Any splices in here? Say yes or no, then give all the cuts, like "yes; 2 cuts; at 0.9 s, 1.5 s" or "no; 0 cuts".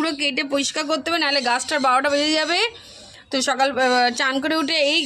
no; 0 cuts